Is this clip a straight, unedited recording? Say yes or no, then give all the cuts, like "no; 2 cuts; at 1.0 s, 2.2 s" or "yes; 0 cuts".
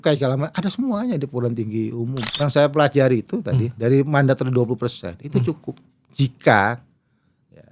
no; 1 cut; at 2.2 s